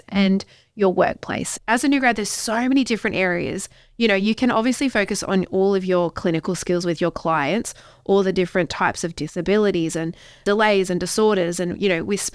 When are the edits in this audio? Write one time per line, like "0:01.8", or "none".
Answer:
0:01.5
0:10.4